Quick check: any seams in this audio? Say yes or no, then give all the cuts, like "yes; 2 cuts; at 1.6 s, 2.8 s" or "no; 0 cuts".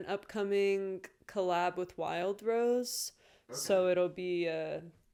no; 0 cuts